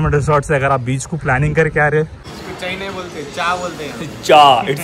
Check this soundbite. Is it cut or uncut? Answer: cut